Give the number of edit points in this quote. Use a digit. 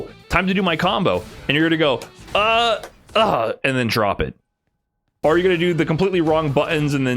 1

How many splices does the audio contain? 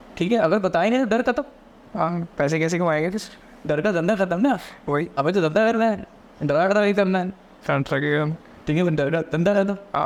0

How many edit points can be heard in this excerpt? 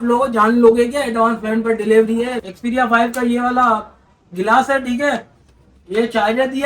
1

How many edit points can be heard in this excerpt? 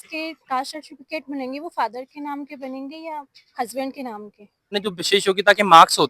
1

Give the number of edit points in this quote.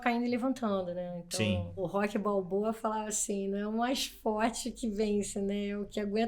1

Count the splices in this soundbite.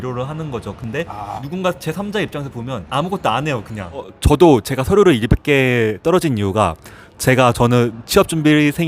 3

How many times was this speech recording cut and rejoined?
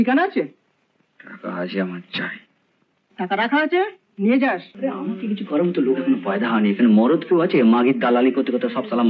1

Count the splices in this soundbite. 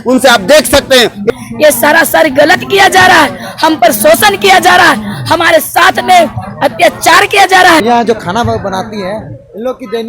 2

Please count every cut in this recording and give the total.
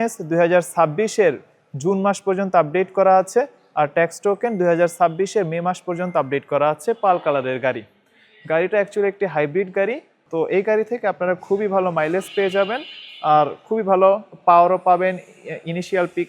0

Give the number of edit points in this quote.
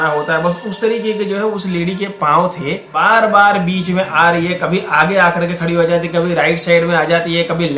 1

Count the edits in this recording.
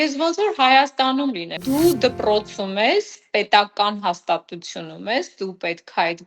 1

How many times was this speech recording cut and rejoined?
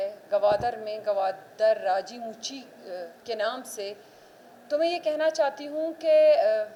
0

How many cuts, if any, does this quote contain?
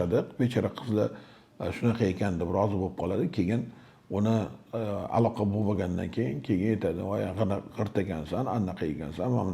0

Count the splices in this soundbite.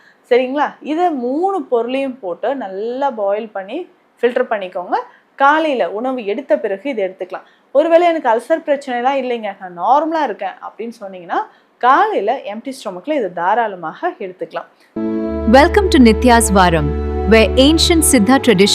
1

